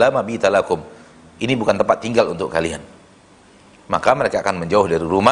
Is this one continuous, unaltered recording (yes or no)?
yes